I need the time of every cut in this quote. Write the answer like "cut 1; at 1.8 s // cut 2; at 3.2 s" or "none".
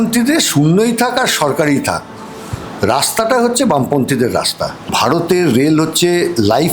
cut 1; at 4.9 s

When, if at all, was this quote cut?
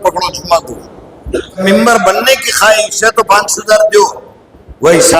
cut 1; at 1.6 s

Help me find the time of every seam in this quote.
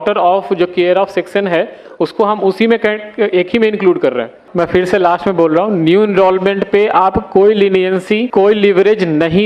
cut 1; at 4.4 s // cut 2; at 8.3 s

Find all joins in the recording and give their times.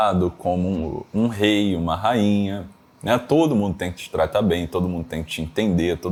none

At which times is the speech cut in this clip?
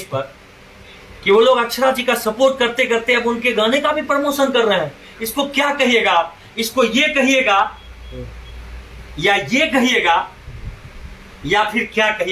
none

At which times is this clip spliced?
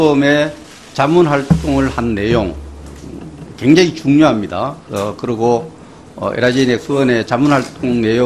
none

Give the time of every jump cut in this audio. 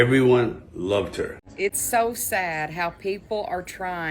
cut 1; at 1.5 s

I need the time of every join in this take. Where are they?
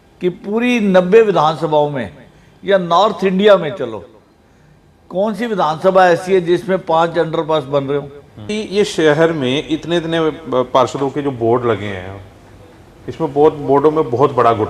cut 1; at 8.5 s

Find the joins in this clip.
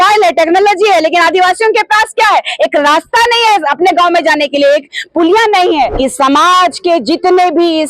cut 1; at 5.9 s

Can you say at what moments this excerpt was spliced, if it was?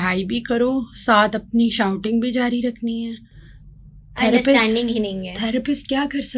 none

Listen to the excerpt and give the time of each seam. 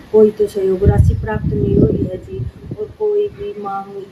none

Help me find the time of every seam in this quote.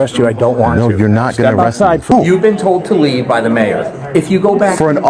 cut 1; at 2.1 s

